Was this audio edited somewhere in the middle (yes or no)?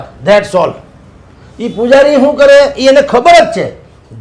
no